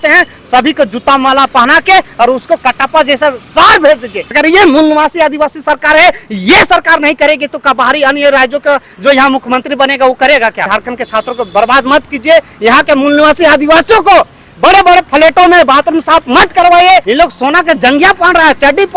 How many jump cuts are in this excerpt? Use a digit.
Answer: 3